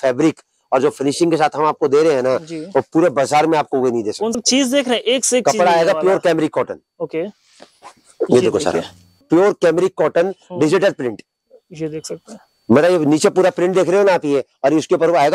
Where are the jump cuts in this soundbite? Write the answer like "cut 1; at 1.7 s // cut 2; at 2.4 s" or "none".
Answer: cut 1; at 4.3 s // cut 2; at 9.2 s